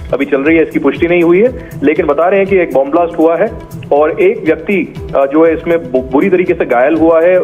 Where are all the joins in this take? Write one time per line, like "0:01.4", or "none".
none